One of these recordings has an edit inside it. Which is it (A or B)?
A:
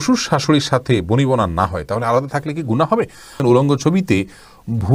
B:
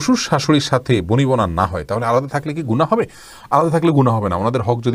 A